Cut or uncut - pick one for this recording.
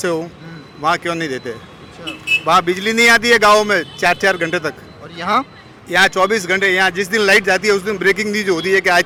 uncut